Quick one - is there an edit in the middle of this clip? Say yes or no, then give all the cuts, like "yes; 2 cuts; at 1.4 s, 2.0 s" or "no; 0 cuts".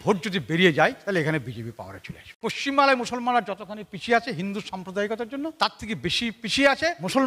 yes; 1 cut; at 2.3 s